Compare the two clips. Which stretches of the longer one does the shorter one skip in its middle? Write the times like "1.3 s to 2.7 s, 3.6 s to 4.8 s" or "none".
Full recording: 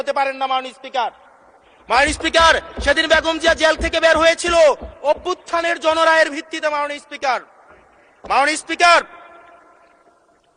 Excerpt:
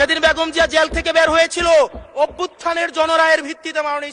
none